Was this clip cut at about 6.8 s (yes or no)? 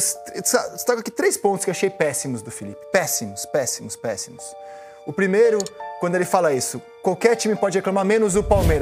yes